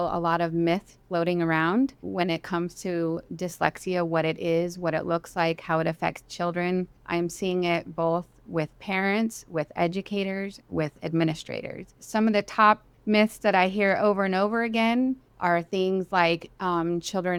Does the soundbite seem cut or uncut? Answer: uncut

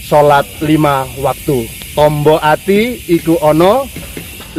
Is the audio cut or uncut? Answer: uncut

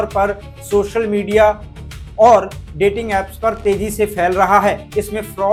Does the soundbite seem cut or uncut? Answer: uncut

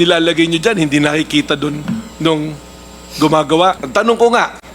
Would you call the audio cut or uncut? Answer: cut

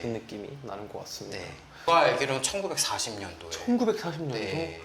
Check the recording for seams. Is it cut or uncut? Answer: cut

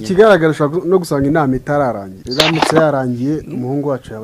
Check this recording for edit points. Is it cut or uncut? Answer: cut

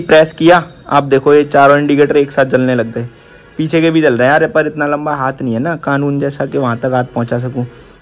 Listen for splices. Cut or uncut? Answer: uncut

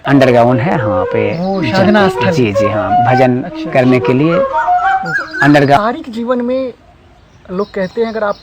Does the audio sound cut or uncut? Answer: cut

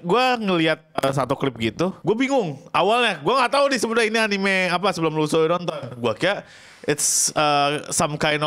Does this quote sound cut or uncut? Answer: cut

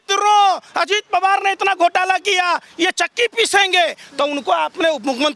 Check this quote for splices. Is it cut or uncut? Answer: uncut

